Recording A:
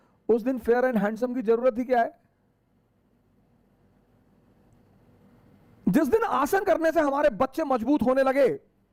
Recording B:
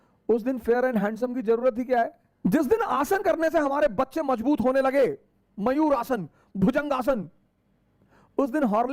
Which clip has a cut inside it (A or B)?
B